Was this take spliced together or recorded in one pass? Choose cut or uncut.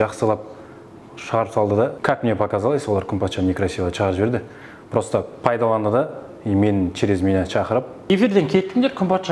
cut